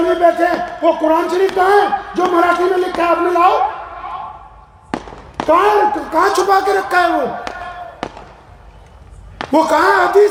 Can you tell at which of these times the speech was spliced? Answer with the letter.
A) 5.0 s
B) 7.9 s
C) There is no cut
C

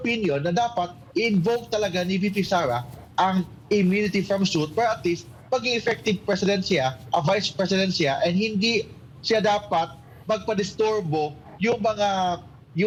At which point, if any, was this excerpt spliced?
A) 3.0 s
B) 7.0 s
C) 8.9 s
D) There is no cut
D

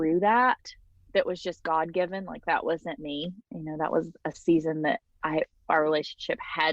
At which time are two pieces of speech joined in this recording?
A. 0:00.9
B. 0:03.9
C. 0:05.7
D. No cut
A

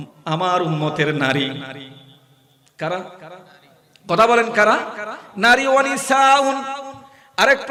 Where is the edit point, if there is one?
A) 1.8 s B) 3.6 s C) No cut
C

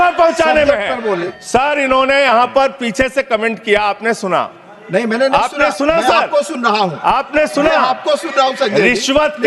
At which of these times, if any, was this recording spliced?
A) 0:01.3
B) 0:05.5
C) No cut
A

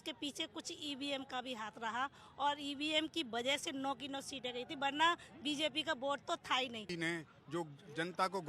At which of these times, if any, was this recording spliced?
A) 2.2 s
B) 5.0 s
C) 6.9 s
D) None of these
C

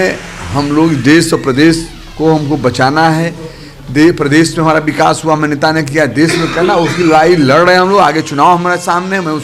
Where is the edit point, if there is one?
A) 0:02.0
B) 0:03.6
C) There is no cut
C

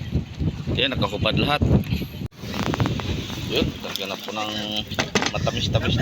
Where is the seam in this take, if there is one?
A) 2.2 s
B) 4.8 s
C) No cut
A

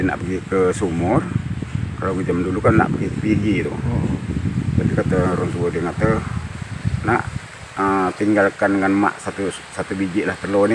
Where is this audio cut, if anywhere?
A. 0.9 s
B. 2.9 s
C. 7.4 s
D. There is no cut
D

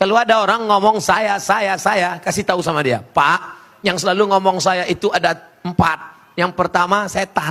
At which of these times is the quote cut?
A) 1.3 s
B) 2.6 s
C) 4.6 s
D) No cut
D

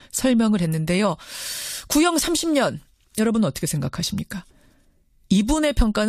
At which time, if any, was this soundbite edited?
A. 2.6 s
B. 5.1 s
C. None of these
A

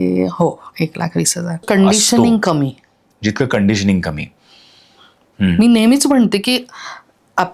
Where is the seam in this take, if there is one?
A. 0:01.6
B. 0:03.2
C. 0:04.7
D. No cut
A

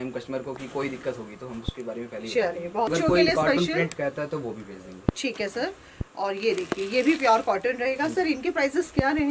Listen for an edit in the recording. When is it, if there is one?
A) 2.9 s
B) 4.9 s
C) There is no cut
A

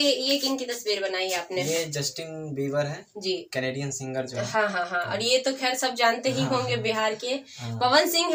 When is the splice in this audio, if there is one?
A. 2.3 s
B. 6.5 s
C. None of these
C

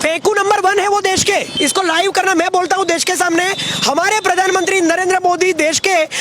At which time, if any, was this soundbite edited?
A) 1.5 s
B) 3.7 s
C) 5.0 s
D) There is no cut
A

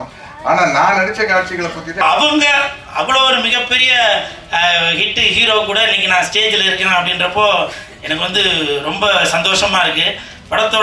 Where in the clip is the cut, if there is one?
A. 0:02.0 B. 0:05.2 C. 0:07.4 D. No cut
A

